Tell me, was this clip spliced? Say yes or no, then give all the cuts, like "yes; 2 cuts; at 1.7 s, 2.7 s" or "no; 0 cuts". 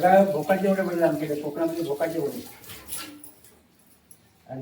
no; 0 cuts